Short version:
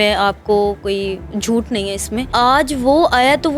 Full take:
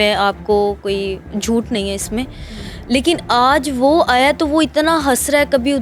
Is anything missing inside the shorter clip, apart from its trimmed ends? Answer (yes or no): yes